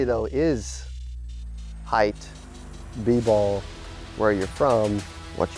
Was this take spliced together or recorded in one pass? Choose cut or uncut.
uncut